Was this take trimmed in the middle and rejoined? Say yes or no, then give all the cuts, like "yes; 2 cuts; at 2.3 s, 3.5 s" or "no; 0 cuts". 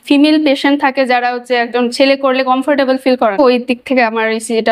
yes; 1 cut; at 3.3 s